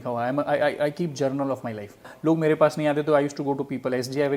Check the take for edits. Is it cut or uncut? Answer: cut